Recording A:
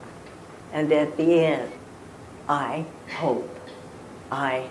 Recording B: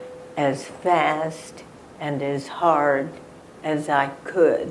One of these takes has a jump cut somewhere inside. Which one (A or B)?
A